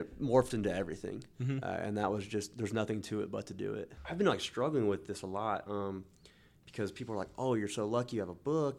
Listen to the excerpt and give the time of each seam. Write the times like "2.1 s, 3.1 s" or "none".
3.9 s